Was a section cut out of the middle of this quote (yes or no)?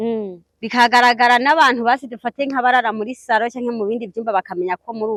no